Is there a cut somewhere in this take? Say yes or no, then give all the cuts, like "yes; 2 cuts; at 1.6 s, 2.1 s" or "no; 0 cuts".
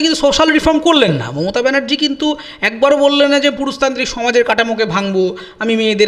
no; 0 cuts